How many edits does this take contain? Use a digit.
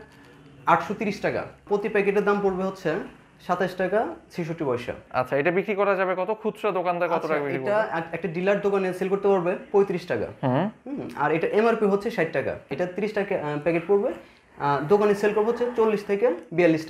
3